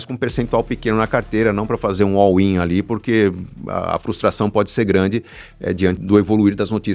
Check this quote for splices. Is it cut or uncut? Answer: cut